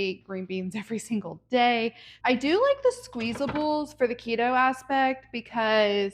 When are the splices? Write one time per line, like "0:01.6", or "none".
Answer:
0:02.1